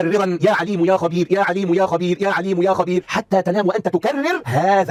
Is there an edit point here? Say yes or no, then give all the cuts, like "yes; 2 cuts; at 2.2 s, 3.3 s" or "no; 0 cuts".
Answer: no; 0 cuts